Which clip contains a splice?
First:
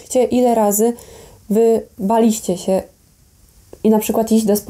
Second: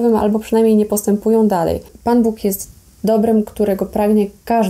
second; 1 cut; at 1.9 s

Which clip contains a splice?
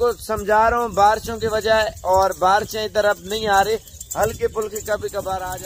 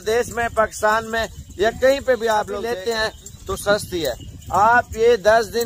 second; 1 cut; at 2.6 s

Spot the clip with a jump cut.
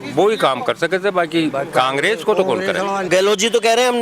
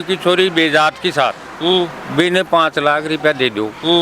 first; 1 cut; at 3.0 s

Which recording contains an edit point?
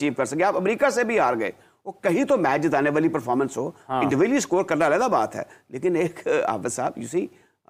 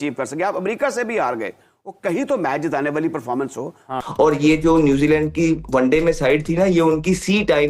second; 1 cut; at 4.0 s

